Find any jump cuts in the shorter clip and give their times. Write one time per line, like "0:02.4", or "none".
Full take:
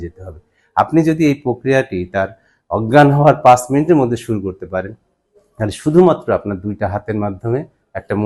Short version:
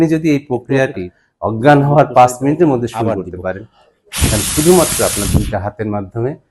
0:01.1